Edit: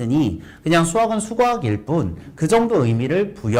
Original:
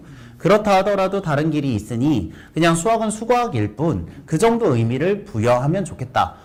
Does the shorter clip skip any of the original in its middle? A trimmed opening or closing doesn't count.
no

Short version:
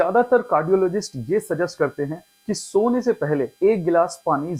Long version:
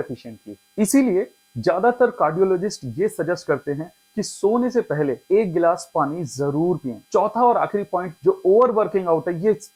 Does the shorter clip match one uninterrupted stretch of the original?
yes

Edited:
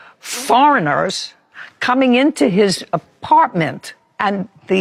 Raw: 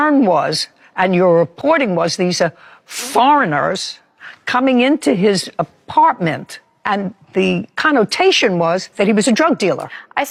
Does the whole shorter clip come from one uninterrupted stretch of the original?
yes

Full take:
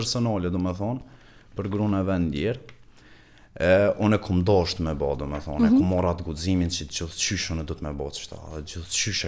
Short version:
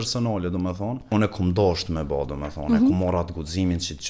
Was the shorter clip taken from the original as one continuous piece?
no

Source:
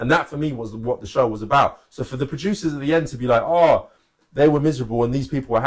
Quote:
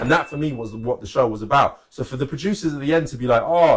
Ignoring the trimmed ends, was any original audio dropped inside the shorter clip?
no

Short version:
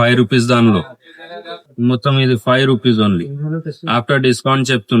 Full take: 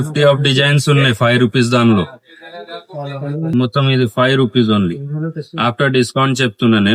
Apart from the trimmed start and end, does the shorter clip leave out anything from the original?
yes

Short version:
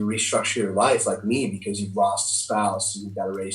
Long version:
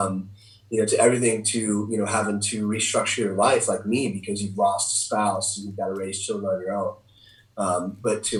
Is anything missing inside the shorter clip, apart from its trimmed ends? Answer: no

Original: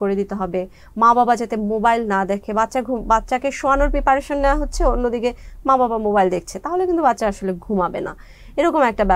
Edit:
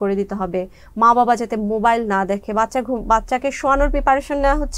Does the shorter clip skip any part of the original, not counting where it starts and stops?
no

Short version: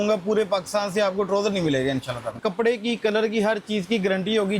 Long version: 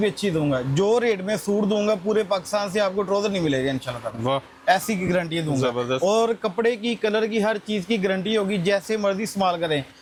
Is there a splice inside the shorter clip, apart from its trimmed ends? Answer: yes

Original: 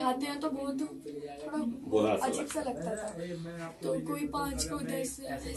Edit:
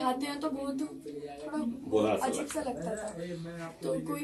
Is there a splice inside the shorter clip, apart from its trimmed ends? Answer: no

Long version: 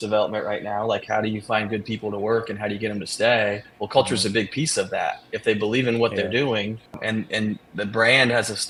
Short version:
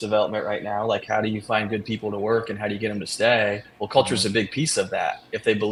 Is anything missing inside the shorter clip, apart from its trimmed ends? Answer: no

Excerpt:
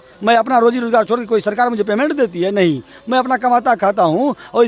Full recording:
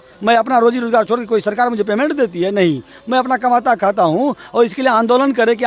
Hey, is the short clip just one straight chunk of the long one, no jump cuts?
yes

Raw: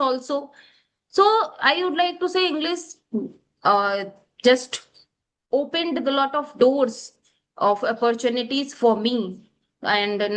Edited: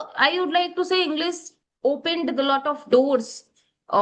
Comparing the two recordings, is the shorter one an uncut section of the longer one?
no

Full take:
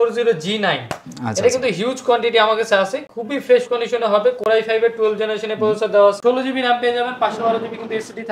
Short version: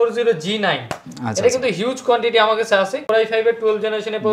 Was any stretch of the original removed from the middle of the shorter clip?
yes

